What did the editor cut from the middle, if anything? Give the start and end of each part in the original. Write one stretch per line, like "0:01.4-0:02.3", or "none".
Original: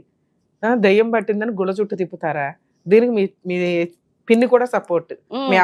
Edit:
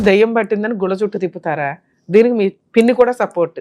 0:03.4-0:04.1

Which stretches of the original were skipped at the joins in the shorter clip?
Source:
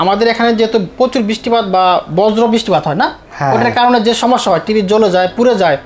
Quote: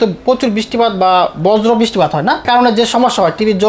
0:03.2-0:03.7

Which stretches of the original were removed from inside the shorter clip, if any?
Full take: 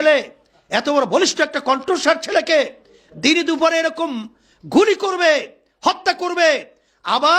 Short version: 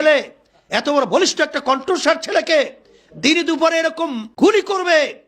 0:04.2-0:04.6

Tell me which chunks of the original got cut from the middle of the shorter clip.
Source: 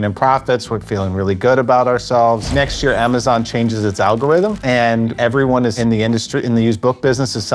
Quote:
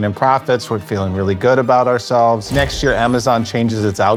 none

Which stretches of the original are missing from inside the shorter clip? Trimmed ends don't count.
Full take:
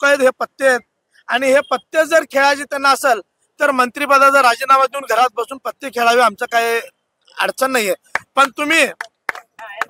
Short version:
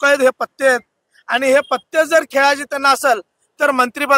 none

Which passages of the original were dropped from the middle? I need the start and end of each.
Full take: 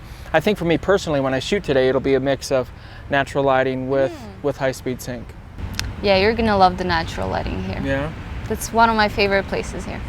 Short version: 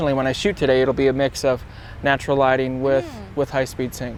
none

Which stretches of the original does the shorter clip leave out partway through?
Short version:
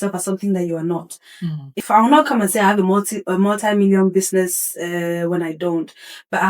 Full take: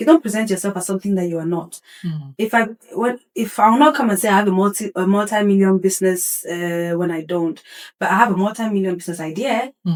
0:02.4-0:03.5

